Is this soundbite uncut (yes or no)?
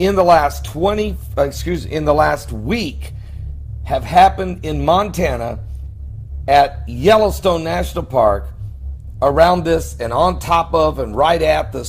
yes